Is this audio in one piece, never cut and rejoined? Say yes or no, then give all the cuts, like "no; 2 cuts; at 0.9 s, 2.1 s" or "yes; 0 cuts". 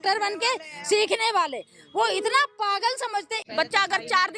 no; 1 cut; at 3.4 s